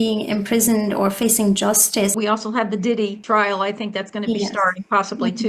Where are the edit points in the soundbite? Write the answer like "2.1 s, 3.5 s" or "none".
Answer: 2.1 s, 3.2 s